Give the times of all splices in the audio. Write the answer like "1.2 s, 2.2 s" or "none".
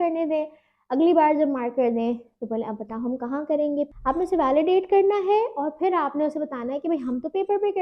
4.0 s